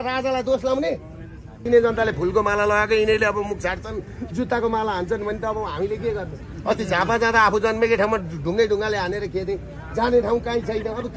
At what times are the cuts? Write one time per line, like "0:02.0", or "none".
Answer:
0:01.7

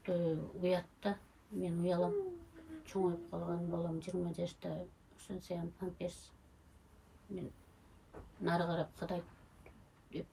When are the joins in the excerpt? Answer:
none

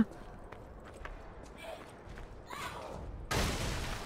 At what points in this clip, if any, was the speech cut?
0:01.0

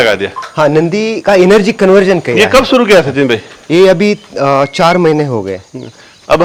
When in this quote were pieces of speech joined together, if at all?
none

